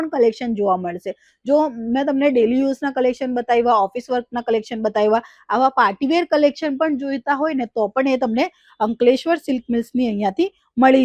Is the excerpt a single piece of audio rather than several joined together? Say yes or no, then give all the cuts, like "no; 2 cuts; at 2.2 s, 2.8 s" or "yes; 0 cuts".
yes; 0 cuts